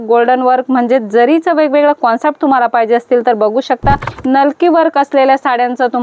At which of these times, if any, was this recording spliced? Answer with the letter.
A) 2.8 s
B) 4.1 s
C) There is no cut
B